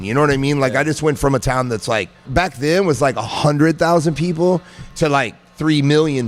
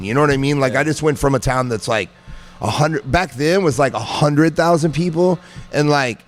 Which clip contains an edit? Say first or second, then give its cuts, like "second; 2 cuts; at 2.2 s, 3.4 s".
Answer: first; 2 cuts; at 2.3 s, 4.8 s